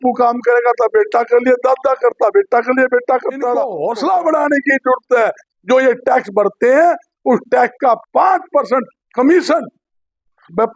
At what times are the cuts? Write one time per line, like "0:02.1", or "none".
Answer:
0:03.7